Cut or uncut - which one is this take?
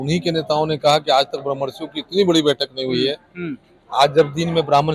uncut